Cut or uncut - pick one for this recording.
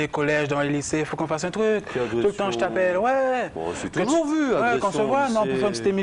cut